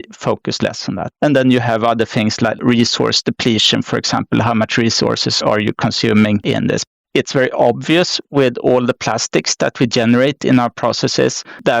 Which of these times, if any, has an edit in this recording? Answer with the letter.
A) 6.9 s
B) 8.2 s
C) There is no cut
A